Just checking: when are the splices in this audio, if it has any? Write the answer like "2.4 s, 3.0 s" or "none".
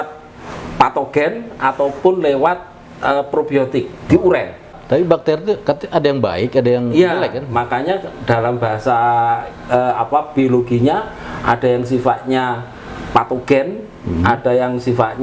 4.7 s